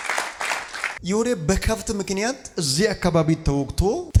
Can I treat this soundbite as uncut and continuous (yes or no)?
yes